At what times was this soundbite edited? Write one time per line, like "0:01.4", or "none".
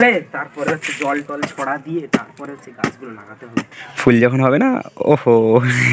0:03.8